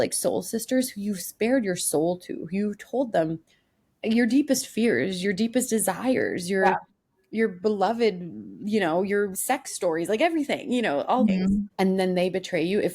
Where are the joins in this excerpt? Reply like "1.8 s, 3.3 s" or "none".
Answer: 11.3 s